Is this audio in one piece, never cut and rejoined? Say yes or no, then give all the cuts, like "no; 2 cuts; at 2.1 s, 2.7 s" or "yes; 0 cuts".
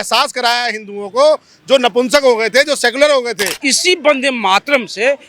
no; 1 cut; at 3.7 s